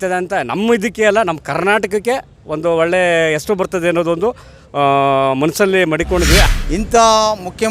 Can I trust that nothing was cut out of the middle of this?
no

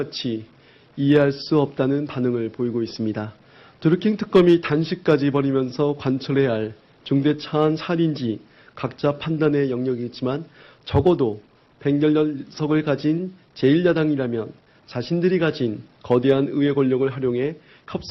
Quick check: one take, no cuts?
no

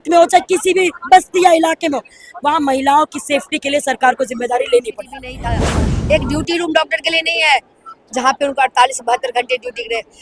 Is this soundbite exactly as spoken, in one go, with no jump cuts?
no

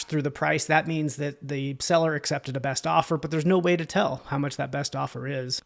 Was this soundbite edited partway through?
no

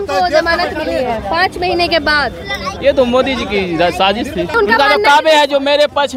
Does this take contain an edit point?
yes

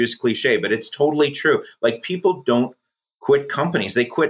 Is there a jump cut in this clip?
no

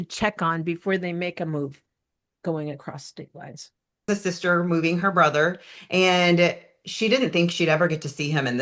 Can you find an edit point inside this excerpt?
yes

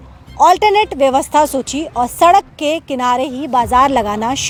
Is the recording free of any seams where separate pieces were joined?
yes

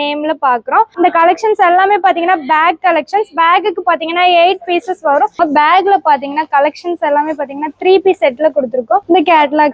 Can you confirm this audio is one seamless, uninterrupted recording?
no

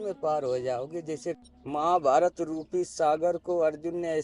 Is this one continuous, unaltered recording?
no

